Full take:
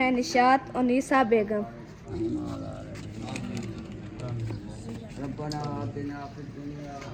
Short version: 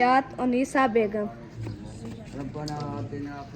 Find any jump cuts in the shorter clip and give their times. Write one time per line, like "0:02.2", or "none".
0:01.6